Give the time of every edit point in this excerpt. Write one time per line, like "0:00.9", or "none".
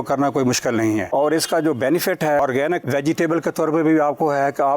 0:01.1
0:02.4